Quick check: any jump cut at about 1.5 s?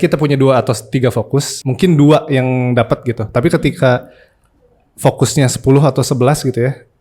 yes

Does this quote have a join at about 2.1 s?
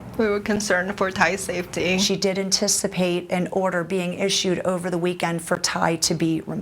yes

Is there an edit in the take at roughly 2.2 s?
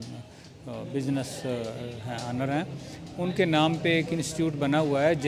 no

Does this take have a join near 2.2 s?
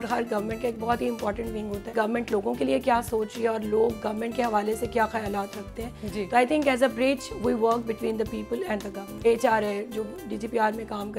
yes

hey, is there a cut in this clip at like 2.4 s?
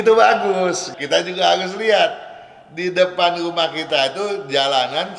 no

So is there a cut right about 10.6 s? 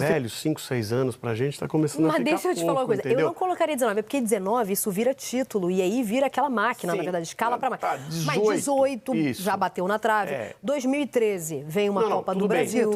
no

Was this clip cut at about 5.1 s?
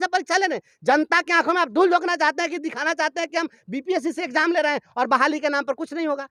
no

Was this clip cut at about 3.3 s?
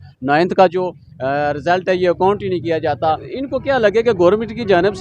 yes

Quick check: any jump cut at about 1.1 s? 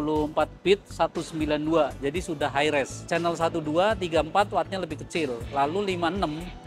no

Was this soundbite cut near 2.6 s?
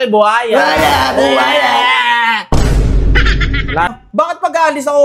no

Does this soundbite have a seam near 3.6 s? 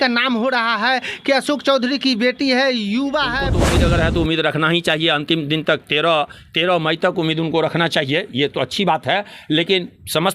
yes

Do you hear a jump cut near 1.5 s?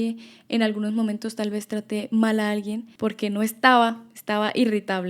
no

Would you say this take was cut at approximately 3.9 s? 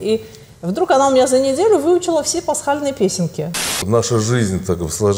yes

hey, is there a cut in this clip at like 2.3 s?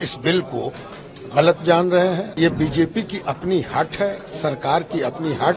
yes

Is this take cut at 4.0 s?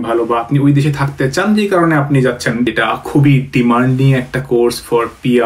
no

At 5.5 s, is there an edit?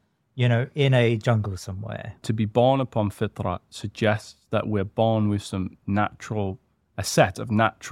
no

